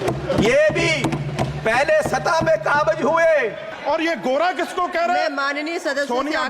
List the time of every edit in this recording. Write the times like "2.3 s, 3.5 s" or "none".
3.7 s